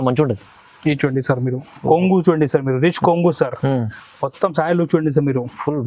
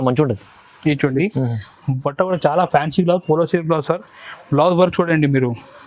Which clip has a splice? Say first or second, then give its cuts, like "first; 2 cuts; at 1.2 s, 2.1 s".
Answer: second; 1 cut; at 1.2 s